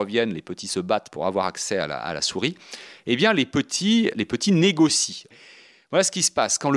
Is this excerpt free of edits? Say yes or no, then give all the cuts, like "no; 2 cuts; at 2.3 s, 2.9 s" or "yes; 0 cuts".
no; 2 cuts; at 4.2 s, 5.4 s